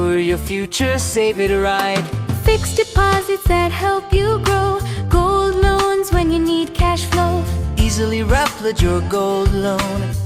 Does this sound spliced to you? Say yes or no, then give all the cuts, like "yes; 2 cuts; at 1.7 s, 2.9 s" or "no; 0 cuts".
no; 0 cuts